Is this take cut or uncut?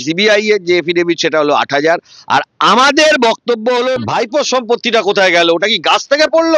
cut